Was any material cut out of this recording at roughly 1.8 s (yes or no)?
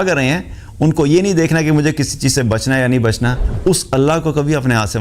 no